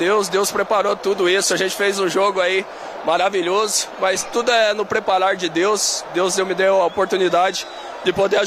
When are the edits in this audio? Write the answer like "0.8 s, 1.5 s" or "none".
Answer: none